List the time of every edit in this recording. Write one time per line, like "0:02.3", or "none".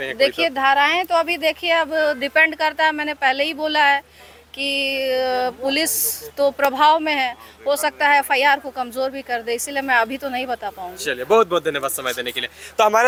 none